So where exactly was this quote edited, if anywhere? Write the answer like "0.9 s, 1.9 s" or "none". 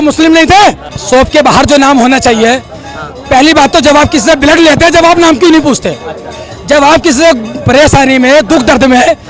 0.9 s